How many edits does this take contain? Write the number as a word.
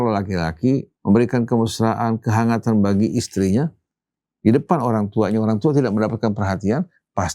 one